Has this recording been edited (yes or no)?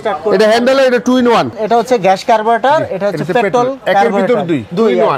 yes